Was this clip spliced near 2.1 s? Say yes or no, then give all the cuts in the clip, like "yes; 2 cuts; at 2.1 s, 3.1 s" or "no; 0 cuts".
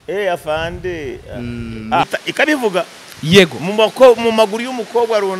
yes; 1 cut; at 2.1 s